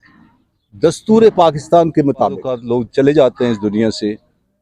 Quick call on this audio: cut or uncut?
cut